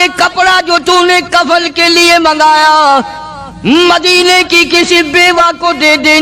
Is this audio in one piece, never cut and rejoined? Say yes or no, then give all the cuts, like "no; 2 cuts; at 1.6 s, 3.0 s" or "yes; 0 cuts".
yes; 0 cuts